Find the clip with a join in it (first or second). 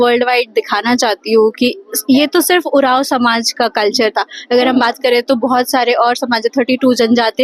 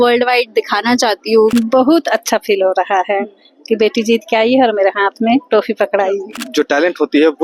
second